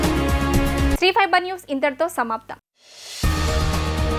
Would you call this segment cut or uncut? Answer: uncut